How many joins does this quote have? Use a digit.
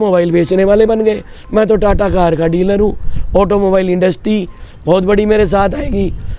0